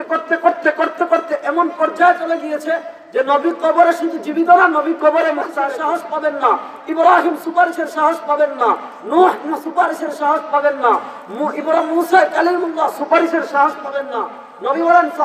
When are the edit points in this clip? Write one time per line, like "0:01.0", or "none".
0:05.5

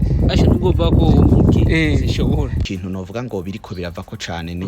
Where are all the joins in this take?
0:02.6

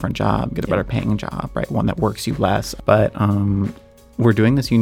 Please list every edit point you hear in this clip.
0:02.7

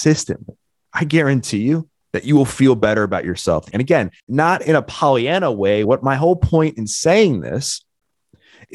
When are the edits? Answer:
0:03.7
0:05.8

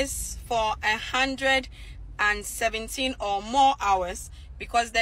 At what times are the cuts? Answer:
none

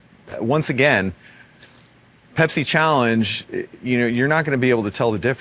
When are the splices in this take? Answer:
none

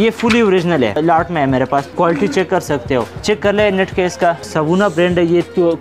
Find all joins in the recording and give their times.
0:01.0
0:01.9
0:03.1
0:04.5

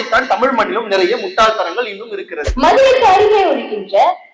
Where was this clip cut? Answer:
0:02.4

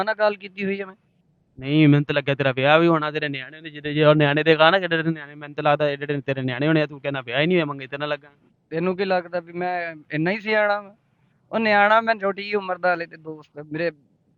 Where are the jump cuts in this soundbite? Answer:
none

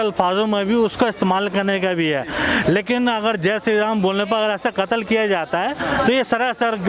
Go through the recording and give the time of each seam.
none

